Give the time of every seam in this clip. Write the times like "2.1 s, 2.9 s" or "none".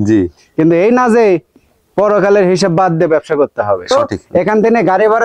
3.9 s